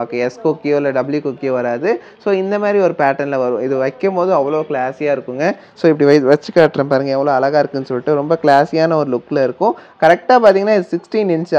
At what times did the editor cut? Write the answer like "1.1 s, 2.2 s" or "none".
none